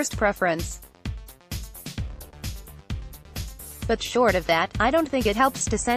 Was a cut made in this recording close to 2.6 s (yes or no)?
no